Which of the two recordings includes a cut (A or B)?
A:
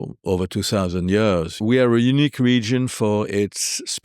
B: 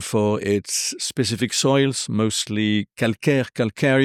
A